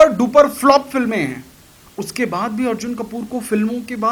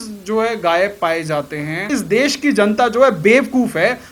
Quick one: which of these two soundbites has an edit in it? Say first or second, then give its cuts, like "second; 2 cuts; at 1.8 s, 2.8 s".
second; 1 cut; at 1.9 s